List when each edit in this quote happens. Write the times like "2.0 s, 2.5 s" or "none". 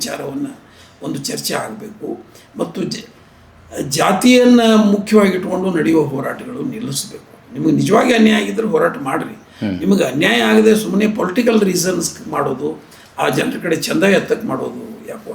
none